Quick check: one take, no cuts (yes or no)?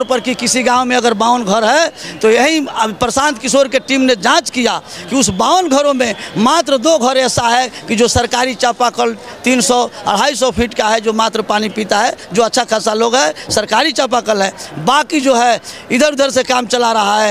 yes